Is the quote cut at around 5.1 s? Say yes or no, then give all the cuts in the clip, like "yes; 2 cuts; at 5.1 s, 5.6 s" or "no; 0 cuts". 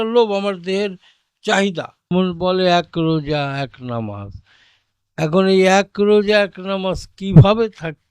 no; 1 cut; at 2.1 s